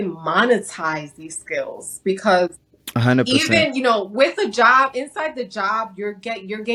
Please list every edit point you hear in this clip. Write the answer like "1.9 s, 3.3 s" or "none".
none